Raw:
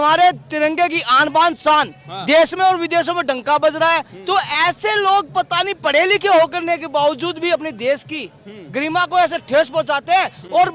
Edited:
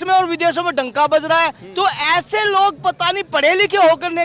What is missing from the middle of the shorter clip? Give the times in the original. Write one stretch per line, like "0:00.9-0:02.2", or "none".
none